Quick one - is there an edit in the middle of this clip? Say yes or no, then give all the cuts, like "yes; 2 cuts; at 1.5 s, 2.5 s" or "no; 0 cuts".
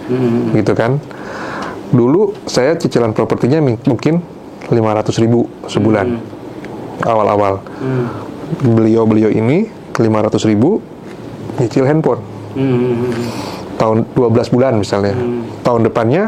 no; 0 cuts